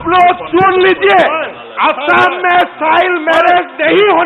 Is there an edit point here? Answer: no; 0 cuts

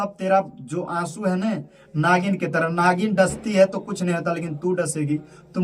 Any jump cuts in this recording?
no; 0 cuts

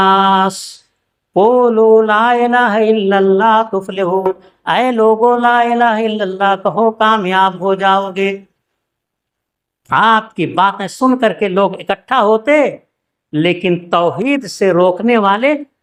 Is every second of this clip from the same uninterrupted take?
yes; 0 cuts

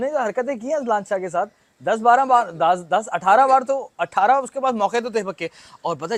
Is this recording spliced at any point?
no; 0 cuts

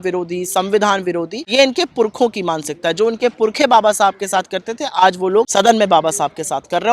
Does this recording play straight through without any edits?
no; 2 cuts; at 1.4 s, 5.5 s

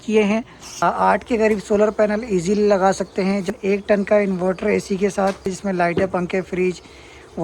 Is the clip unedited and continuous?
no; 3 cuts; at 0.8 s, 3.5 s, 5.6 s

